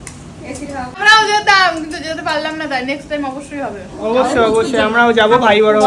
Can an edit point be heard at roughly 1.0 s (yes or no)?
yes